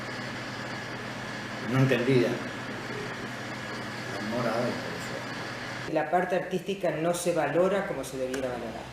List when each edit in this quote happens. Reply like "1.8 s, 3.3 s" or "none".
5.9 s